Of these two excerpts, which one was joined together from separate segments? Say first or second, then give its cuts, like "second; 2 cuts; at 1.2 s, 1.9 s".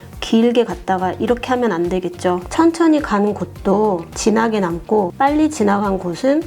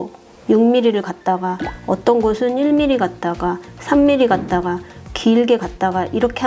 first; 3 cuts; at 2.5 s, 4.1 s, 5.1 s